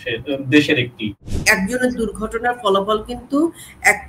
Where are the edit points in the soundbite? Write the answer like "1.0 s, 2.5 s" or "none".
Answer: 1.4 s